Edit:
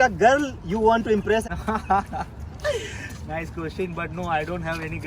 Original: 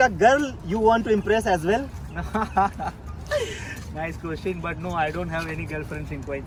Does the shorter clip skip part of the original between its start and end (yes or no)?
yes